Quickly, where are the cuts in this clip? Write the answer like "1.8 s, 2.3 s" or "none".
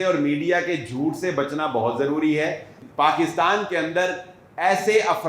2.7 s